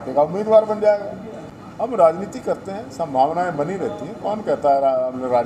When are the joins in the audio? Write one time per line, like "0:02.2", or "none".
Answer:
0:01.6